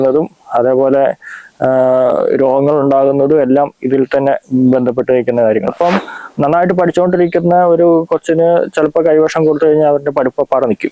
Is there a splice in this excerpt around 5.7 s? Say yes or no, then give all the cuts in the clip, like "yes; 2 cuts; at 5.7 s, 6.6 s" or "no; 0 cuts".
yes; 1 cut; at 5.7 s